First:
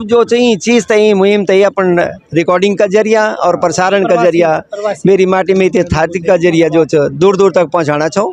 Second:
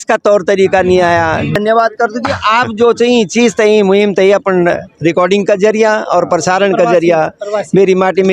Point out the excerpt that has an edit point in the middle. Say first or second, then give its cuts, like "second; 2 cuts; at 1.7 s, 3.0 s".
second; 1 cut; at 1.5 s